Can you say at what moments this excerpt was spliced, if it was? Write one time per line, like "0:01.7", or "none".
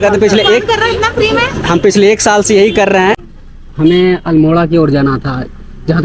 0:03.2